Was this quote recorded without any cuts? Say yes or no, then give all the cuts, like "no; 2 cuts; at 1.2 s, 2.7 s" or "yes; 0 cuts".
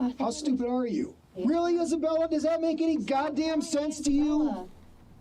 no; 1 cut; at 1.4 s